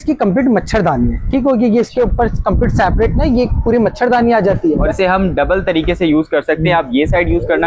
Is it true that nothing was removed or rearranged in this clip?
no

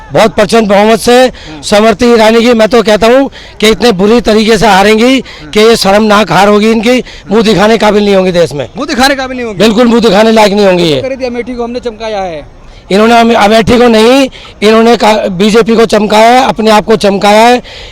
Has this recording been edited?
no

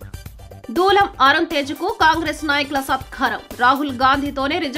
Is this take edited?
no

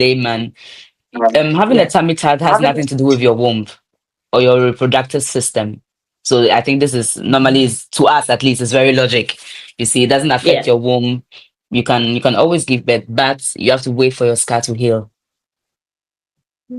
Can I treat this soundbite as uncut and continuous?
yes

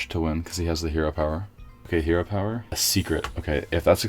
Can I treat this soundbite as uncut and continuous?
no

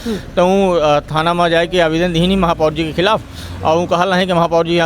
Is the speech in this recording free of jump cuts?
yes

